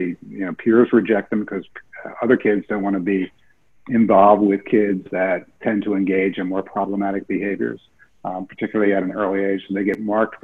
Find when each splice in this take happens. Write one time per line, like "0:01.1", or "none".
none